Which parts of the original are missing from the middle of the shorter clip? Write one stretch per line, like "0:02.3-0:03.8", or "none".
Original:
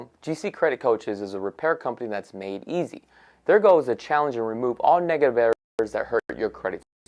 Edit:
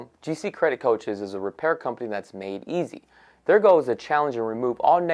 none